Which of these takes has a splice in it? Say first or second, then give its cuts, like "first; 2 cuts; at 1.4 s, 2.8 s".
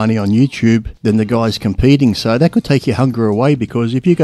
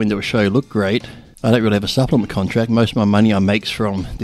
first; 1 cut; at 0.9 s